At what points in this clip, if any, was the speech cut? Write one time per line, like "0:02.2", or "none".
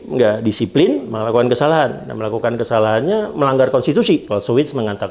0:01.1
0:04.3